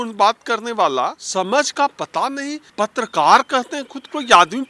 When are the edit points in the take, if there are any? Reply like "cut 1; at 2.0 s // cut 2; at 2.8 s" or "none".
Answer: cut 1; at 1.2 s // cut 2; at 2.6 s